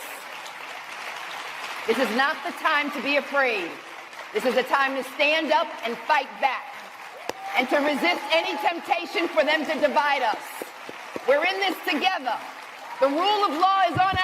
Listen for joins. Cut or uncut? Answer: uncut